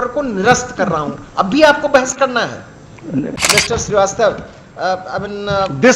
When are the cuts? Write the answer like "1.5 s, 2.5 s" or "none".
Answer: 3.4 s